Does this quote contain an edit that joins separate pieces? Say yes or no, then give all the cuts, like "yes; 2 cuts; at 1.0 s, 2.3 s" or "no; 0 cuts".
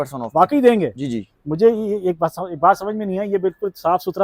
no; 0 cuts